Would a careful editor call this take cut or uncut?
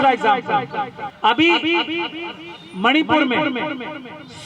cut